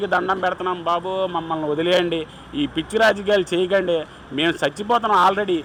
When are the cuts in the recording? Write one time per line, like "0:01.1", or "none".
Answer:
none

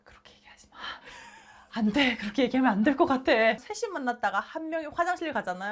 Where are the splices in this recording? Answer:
0:03.6

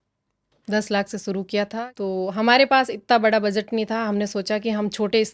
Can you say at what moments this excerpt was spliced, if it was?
0:01.8

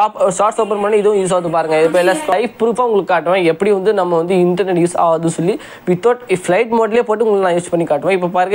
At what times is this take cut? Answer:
0:02.3

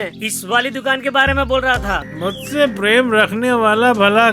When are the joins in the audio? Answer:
0:01.9

